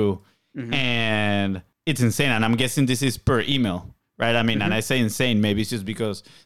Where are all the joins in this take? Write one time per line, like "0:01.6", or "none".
0:01.7